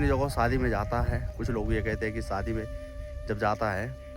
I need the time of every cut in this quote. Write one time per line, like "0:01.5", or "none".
0:01.3

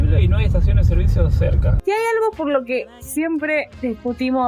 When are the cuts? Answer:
0:01.8

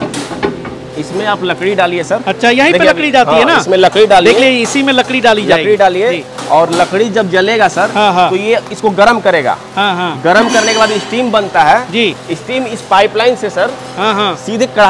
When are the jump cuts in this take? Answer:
none

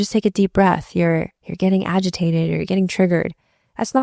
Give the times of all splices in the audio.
0:01.4

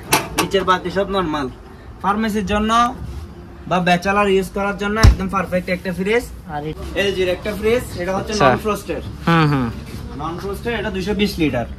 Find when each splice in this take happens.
0:06.7

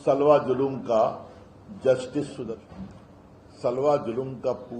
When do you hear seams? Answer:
0:02.5

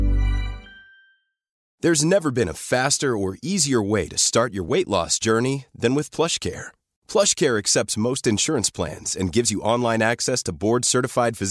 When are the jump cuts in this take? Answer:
0:01.6

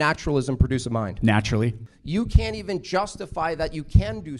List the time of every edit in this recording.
0:01.8

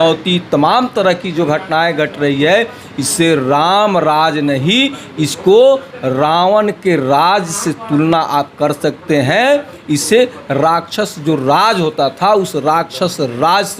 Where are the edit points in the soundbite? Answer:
none

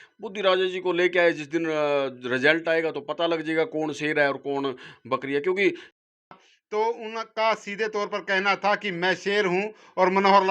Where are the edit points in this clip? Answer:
0:06.1

